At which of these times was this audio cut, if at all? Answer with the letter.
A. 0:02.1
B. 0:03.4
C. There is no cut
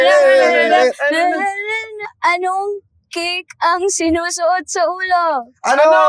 A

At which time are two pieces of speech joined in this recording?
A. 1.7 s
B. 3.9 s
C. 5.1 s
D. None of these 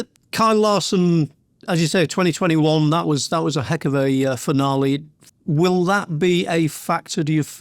C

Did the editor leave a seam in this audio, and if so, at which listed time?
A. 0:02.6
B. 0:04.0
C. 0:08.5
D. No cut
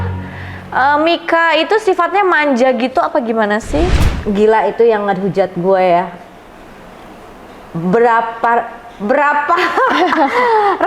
B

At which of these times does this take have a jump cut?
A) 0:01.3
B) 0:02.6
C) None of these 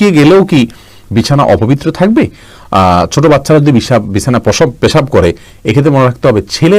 C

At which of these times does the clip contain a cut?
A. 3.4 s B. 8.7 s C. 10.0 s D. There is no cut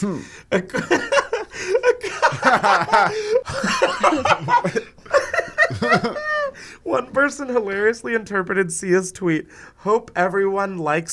A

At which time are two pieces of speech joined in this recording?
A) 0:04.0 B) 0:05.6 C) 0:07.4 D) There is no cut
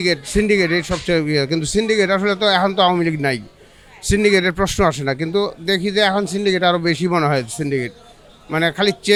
D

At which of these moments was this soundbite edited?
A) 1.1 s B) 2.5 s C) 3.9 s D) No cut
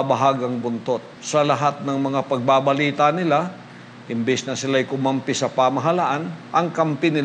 A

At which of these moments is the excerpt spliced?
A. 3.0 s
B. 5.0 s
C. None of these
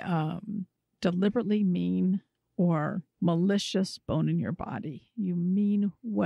A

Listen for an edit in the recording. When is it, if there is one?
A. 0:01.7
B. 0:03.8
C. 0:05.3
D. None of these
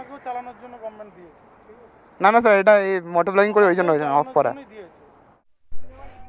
C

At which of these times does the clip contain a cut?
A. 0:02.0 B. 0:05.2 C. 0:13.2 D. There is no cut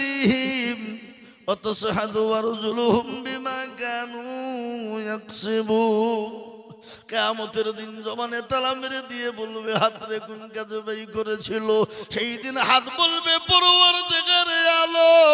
D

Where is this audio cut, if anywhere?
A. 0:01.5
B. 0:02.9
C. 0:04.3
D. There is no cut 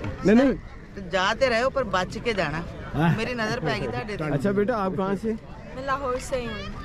C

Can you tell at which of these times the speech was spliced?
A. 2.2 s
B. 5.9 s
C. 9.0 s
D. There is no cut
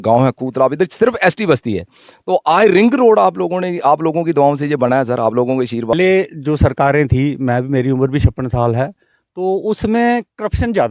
B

